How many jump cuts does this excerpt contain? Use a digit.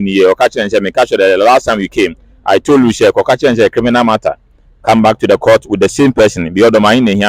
0